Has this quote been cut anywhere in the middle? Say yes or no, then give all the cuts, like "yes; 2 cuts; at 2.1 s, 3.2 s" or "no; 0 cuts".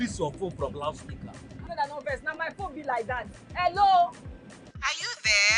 no; 0 cuts